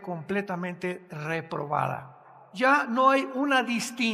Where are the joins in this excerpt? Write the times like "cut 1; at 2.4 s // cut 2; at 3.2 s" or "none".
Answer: cut 1; at 2.5 s